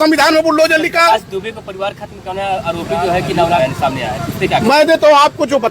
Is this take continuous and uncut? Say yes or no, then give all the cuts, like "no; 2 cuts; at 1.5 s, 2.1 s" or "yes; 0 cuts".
no; 1 cut; at 3.6 s